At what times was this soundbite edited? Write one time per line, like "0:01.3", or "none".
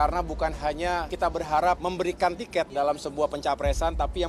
0:02.7